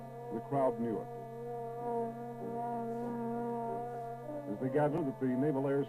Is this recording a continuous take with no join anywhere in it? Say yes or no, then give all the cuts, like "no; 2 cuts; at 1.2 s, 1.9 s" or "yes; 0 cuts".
no; 1 cut; at 2.9 s